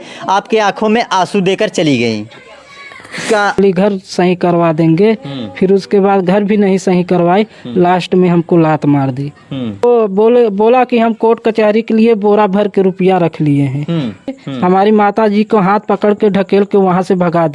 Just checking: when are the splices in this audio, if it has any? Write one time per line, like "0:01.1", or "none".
0:03.6
0:09.8
0:14.4